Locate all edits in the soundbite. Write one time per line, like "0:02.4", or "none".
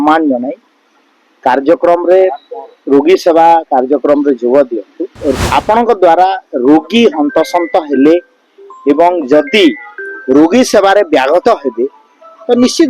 0:05.2